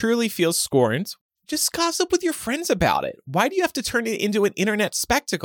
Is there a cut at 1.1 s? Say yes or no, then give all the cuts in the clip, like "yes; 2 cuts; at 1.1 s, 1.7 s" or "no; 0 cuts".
yes; 1 cut; at 1.1 s